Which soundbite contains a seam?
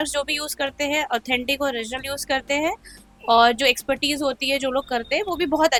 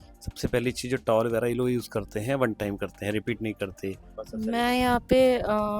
second; 1 cut; at 4.2 s

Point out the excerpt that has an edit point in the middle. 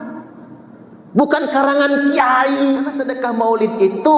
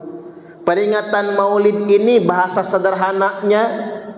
first; 1 cut; at 3.0 s

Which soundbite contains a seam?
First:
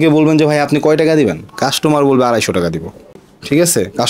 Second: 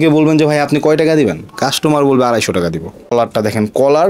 second; 1 cut; at 3.1 s

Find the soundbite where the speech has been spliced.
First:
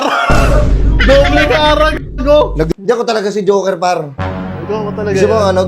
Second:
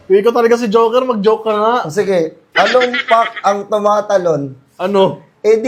first; 1 cut; at 2.7 s

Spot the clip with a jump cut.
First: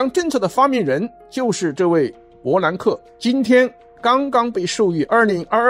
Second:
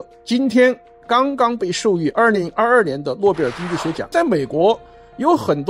second; 1 cut; at 4.1 s

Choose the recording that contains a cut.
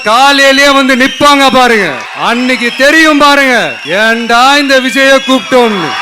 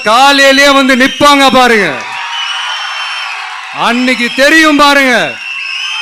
first; 2 cuts; at 2.0 s, 3.8 s

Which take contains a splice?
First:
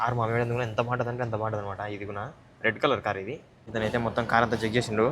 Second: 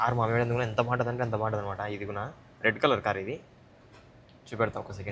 first; 1 cut; at 3.6 s

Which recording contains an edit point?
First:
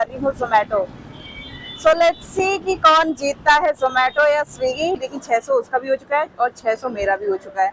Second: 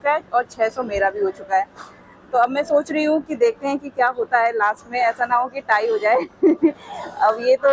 first; 1 cut; at 5.1 s

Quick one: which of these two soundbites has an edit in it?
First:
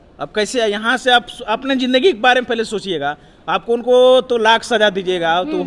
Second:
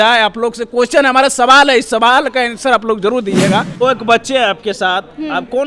second; 1 cut; at 3.8 s

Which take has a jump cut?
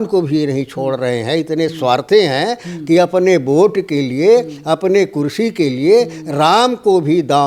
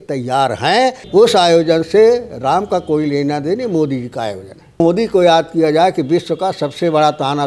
second; 2 cuts; at 1.0 s, 4.8 s

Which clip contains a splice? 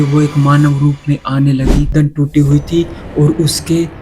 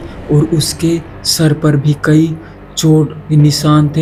first; 1 cut; at 1.9 s

